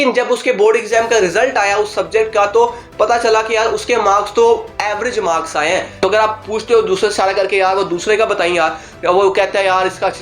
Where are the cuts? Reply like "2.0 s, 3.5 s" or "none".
6.0 s